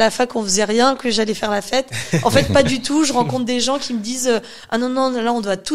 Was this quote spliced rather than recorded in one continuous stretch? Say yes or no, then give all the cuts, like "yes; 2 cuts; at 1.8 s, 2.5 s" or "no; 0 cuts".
no; 0 cuts